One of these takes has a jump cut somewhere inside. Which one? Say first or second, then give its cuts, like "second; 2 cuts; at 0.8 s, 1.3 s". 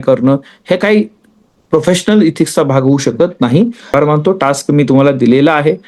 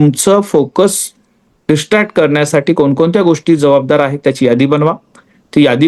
first; 1 cut; at 3.9 s